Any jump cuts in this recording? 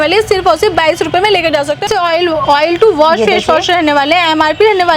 no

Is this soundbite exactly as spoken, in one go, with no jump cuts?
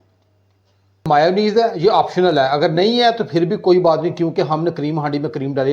no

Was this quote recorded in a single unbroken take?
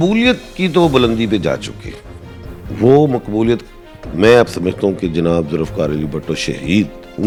yes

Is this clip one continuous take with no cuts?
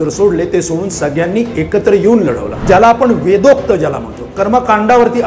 no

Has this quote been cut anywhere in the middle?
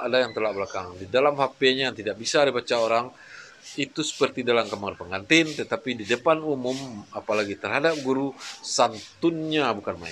no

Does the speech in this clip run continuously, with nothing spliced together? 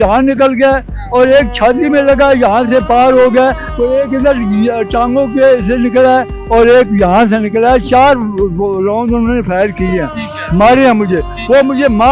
no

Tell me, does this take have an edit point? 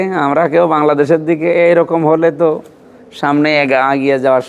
no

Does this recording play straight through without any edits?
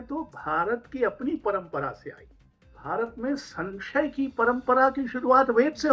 no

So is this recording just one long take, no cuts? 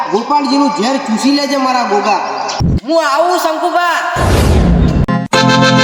no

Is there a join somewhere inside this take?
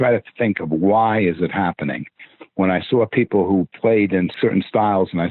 yes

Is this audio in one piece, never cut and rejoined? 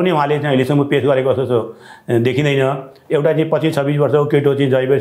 yes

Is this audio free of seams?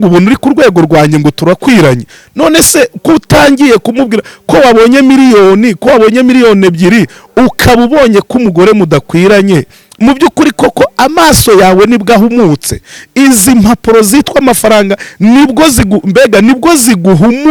yes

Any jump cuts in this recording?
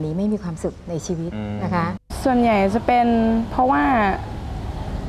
yes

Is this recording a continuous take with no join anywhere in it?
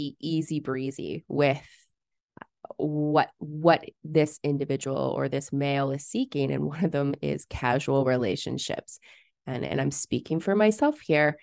yes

